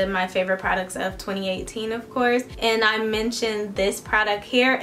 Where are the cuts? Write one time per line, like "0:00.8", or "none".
0:02.5

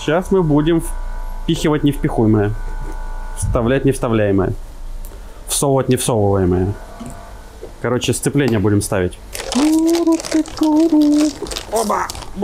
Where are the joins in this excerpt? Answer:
none

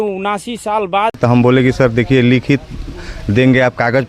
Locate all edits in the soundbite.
0:01.2

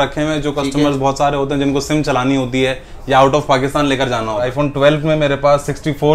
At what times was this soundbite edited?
0:04.5

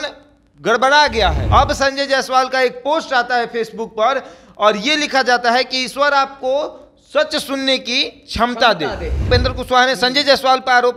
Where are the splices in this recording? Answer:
0:01.4
0:09.3

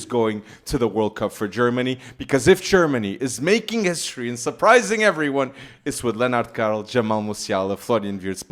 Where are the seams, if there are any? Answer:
none

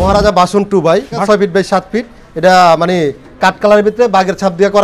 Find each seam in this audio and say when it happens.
0:01.2

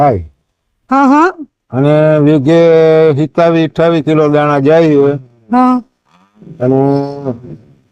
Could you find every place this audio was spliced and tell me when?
none

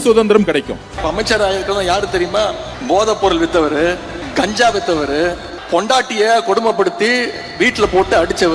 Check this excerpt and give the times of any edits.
0:01.0
0:02.7
0:04.1
0:05.5

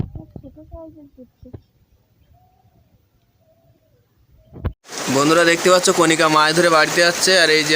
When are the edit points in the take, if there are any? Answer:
0:04.8

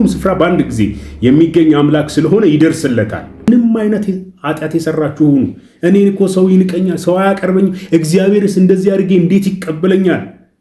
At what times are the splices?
0:03.5

